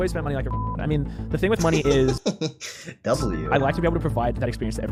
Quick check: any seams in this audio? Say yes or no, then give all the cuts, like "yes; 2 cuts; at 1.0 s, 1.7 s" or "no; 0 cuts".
no; 0 cuts